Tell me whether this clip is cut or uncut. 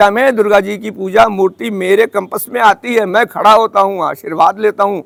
uncut